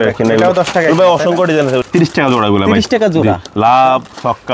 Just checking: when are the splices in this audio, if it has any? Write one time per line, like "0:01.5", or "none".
0:01.9